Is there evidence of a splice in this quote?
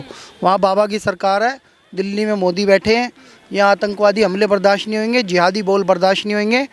no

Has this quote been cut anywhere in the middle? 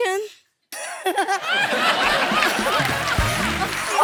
no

